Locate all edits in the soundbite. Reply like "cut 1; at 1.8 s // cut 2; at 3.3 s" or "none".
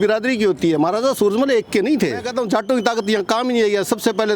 cut 1; at 2.3 s